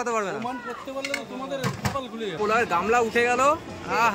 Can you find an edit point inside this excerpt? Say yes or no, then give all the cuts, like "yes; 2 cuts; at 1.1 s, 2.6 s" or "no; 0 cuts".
yes; 1 cut; at 2.4 s